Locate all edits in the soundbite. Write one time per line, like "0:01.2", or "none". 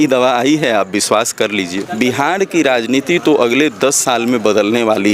0:01.8